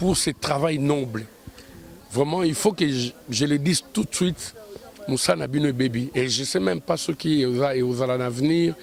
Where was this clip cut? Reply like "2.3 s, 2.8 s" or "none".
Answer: none